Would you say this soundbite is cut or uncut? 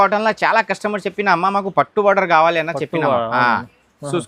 uncut